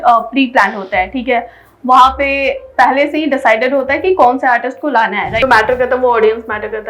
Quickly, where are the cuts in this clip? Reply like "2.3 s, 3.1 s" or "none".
5.3 s